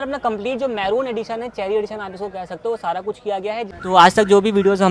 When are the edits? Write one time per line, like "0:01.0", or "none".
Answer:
0:03.7